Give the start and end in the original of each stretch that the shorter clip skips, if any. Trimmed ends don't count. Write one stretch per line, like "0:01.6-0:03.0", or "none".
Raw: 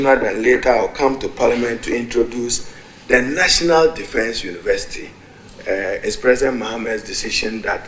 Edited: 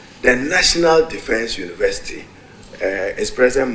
none